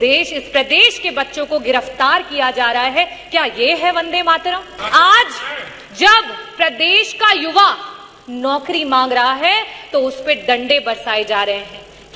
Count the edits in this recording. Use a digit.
1